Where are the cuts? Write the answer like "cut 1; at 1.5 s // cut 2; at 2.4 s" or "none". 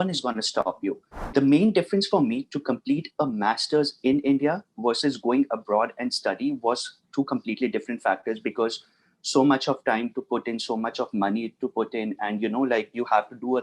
cut 1; at 1.1 s

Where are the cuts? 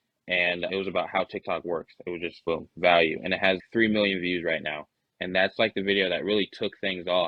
none

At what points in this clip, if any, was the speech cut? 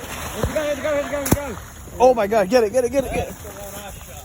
none

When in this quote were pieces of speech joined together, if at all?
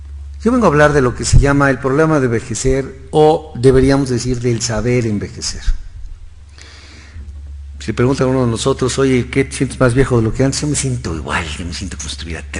cut 1; at 8.6 s

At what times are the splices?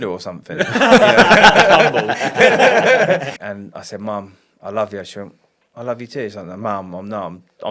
cut 1; at 3.4 s

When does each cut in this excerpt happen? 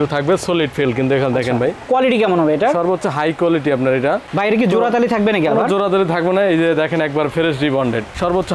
cut 1; at 4.3 s

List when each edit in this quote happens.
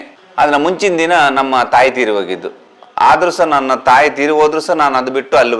none

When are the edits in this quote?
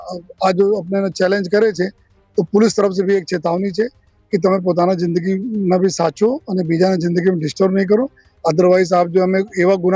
none

